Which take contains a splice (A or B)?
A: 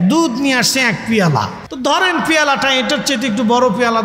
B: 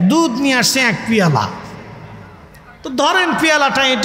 A